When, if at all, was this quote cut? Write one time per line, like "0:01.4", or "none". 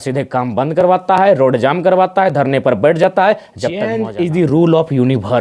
0:03.9